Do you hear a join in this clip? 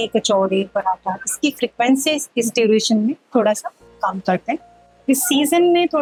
no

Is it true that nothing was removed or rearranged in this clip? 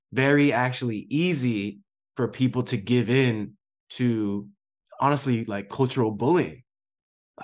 no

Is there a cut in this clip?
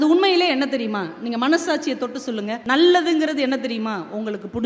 yes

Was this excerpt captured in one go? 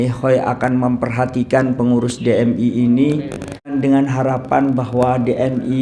no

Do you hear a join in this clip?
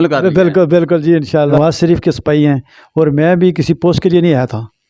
yes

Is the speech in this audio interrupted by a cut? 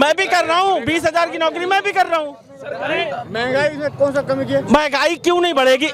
no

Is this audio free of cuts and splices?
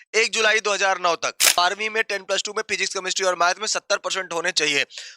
no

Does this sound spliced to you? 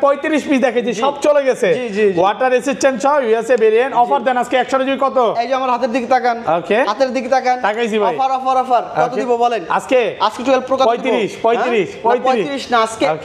no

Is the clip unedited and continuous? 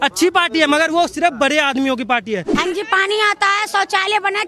no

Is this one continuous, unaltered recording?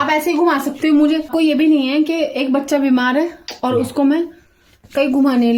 yes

